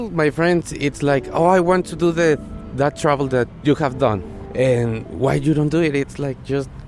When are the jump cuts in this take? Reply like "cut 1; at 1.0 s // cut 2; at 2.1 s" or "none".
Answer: none